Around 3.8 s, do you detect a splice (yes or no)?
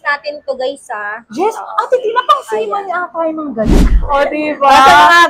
yes